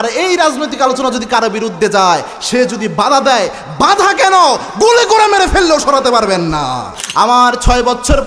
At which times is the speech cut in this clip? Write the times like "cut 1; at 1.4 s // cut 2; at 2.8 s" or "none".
cut 1; at 7.0 s